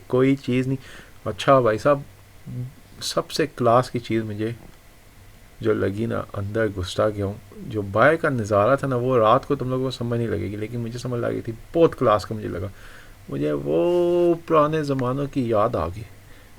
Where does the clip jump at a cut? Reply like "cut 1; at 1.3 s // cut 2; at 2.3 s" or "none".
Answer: none